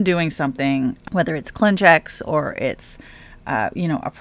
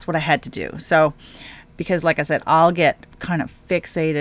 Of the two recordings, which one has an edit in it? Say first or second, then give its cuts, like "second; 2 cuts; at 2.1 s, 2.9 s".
first; 1 cut; at 1.0 s